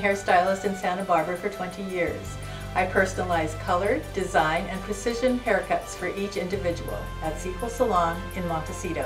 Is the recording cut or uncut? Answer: uncut